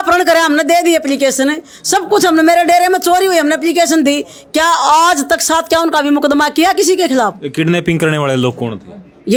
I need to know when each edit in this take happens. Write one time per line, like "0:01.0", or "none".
none